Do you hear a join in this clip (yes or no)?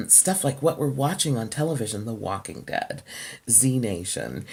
no